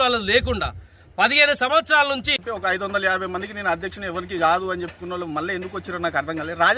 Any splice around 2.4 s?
yes; 1 cut; at 2.4 s

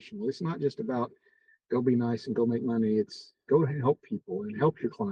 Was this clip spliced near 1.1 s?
no; 0 cuts

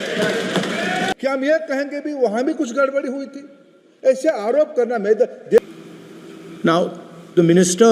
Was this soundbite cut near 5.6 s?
yes; 2 cuts; at 1.1 s, 5.6 s

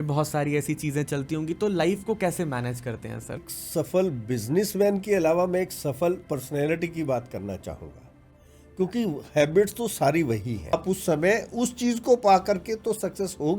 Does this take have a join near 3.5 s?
yes; 2 cuts; at 3.5 s, 10.7 s

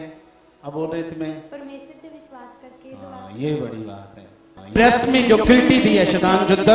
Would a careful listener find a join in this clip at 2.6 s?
no; 1 cut; at 4.7 s

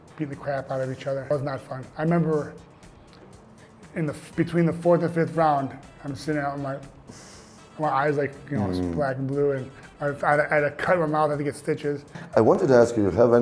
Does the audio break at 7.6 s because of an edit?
no; 2 cuts; at 1.3 s, 12.2 s

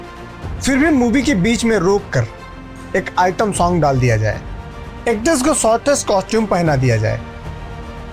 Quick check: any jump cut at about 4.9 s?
yes; 1 cut; at 4.9 s

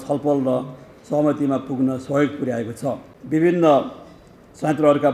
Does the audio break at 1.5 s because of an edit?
no; 1 cut; at 3.1 s

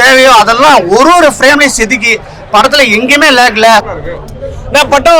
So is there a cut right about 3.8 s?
yes; 1 cut; at 3.8 s

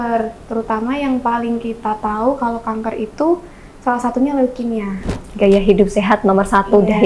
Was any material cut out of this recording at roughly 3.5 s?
no; 1 cut; at 5.2 s

